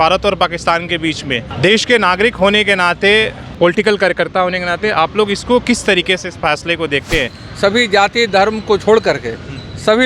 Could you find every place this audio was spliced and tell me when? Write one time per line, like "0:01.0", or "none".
0:01.5
0:03.4
0:07.4